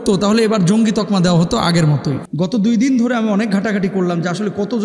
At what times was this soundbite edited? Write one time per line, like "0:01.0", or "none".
0:02.2